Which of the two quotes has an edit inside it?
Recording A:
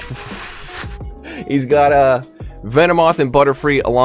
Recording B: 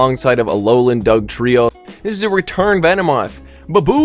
B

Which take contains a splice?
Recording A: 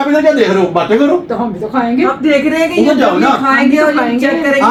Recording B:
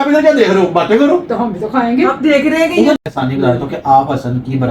B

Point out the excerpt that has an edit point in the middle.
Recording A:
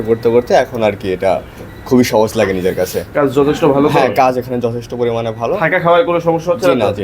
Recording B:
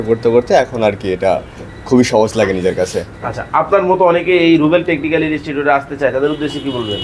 A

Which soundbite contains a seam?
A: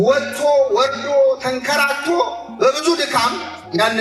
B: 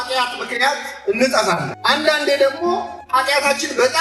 B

